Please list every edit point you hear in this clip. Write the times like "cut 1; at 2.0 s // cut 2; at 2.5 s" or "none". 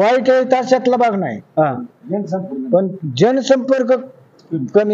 none